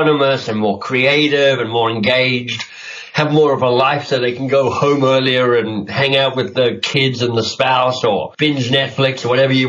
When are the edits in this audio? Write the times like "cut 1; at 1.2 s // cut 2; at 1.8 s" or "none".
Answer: cut 1; at 8.3 s